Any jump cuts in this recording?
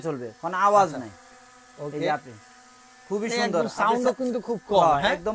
no; 0 cuts

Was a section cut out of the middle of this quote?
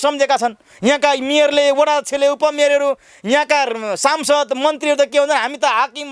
no; 0 cuts

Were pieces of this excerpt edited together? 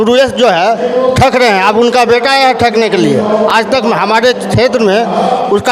no; 0 cuts

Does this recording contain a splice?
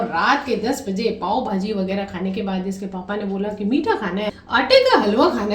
yes; 1 cut; at 4.4 s

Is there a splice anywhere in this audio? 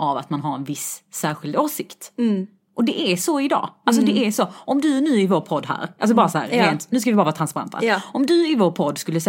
no; 0 cuts

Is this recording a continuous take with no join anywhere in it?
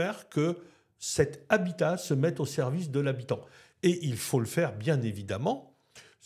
yes; 0 cuts

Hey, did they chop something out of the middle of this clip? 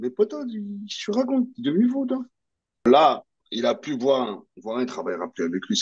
yes; 1 cut; at 2.8 s

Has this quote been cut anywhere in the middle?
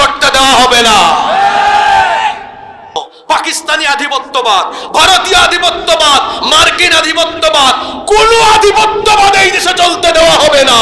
yes; 1 cut; at 3.0 s

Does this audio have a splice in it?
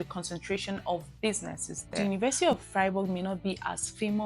yes; 1 cut; at 2.0 s

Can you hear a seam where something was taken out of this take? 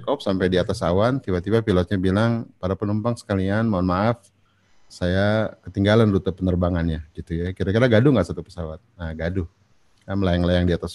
no; 0 cuts

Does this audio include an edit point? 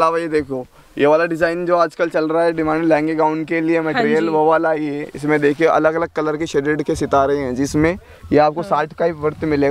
no; 0 cuts

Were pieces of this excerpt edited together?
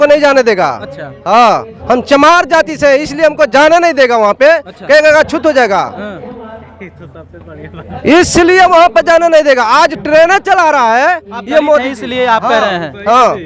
no; 0 cuts

